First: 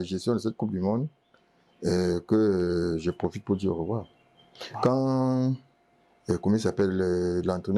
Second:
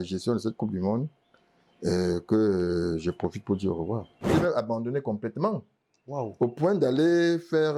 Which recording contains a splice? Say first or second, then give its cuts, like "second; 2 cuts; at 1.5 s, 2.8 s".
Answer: second; 1 cut; at 4.3 s